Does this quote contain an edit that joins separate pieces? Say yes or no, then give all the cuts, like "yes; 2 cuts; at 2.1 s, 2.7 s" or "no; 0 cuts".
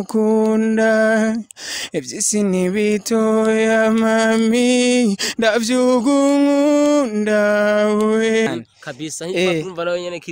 yes; 1 cut; at 8.5 s